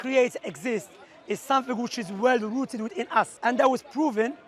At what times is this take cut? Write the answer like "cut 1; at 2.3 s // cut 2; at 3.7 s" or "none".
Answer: cut 1; at 3.3 s